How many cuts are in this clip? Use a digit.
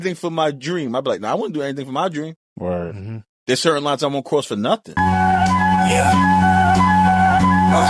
1